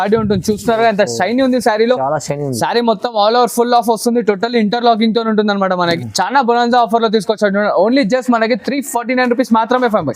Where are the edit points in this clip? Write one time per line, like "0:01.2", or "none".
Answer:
0:06.0